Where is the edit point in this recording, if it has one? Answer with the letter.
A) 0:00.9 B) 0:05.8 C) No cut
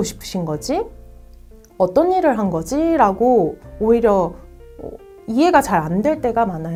C